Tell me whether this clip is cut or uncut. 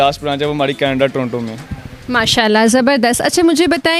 uncut